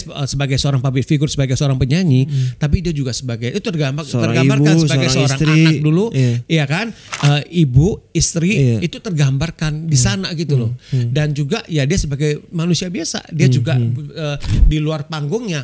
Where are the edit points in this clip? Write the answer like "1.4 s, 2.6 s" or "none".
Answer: 14.6 s